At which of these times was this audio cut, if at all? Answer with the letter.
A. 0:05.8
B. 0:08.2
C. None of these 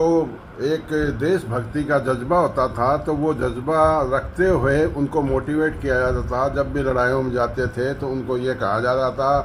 C